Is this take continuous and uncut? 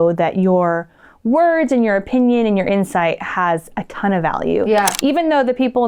yes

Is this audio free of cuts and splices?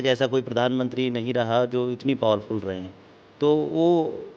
yes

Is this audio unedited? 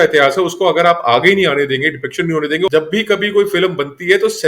no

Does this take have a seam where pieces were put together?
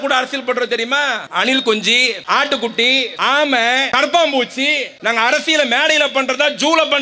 yes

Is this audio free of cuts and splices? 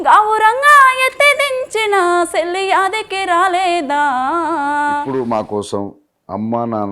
no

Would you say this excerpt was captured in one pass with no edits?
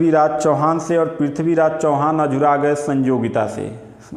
yes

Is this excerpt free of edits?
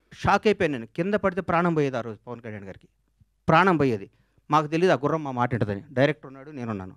yes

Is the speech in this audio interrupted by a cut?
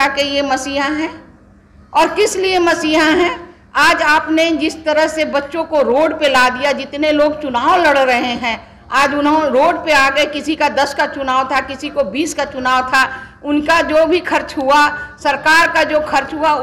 no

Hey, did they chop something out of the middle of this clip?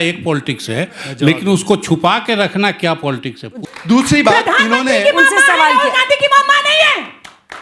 yes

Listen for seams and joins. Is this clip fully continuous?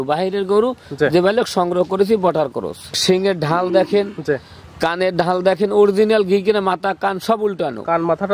no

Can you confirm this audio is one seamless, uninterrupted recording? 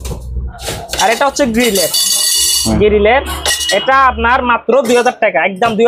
yes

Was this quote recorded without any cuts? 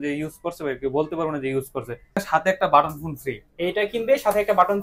no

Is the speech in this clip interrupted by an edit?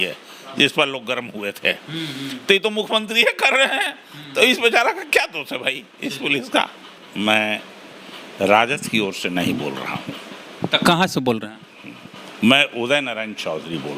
yes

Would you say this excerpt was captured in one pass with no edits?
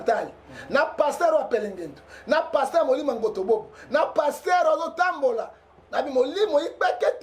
yes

